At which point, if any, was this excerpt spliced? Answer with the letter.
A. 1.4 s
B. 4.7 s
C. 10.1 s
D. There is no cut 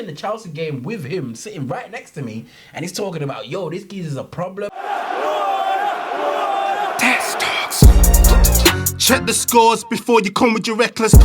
B